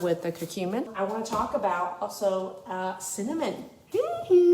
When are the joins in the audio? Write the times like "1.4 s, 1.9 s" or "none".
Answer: 0.9 s